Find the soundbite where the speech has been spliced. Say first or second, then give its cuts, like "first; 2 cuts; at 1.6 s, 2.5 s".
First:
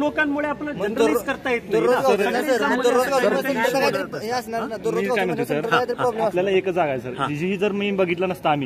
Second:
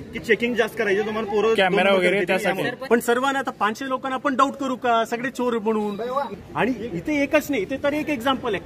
second; 2 cuts; at 2.8 s, 6.3 s